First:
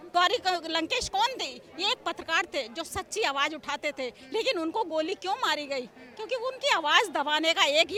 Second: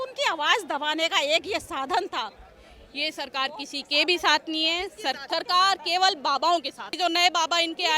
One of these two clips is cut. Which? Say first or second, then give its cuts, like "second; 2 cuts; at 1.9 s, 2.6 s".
second; 3 cuts; at 2.4 s, 5.2 s, 6.9 s